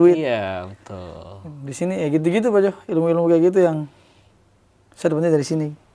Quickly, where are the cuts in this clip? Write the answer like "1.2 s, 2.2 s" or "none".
none